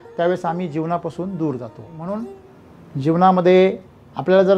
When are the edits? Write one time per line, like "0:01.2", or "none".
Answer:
0:02.1